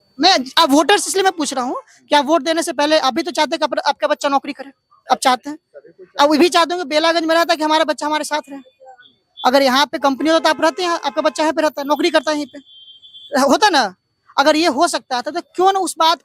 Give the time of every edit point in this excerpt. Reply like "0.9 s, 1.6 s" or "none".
none